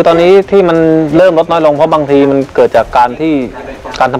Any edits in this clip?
no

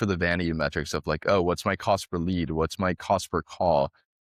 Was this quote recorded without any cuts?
yes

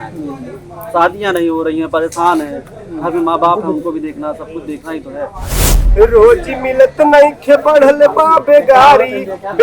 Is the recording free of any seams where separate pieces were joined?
no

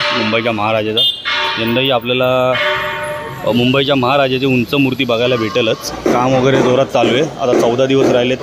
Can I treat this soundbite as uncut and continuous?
no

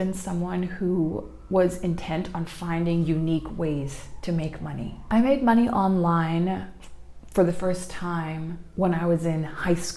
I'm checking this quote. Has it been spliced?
no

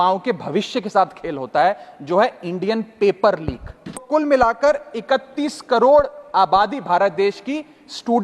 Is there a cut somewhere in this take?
yes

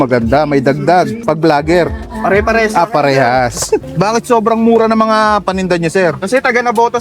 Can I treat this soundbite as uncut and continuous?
no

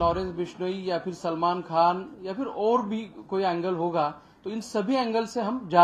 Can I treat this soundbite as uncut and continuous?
yes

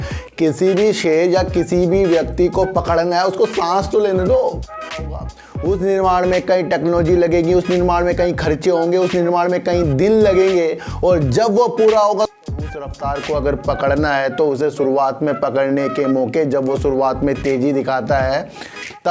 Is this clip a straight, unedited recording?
no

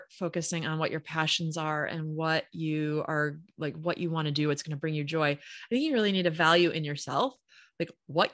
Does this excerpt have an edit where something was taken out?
no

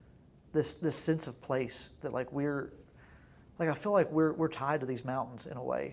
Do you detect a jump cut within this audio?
no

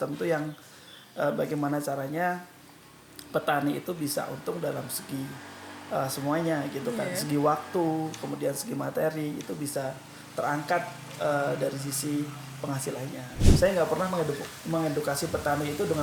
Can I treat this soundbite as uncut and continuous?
no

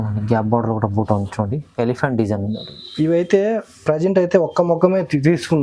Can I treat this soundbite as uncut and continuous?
yes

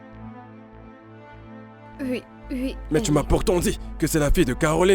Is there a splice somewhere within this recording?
yes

